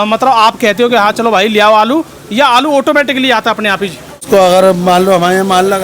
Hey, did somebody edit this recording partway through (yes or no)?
yes